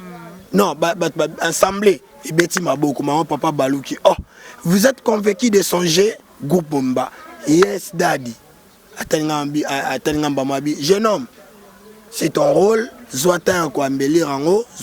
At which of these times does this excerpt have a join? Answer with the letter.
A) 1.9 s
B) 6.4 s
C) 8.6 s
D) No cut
D